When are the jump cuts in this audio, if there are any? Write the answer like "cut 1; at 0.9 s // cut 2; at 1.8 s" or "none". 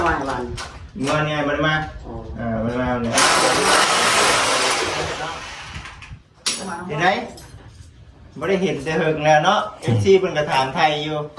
cut 1; at 6.8 s